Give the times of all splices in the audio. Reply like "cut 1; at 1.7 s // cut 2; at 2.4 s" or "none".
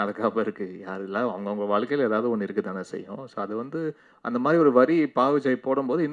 none